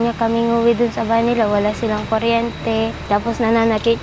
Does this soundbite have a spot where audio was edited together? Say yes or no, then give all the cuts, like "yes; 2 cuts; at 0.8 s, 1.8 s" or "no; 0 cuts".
yes; 1 cut; at 3.0 s